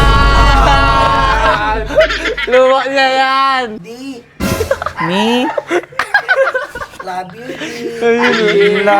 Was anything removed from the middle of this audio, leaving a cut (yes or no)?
yes